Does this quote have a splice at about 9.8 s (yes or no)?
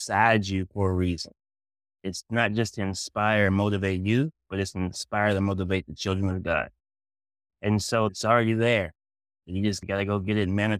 yes